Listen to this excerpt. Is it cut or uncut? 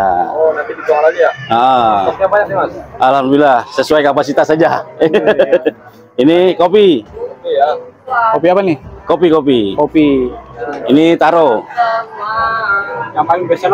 uncut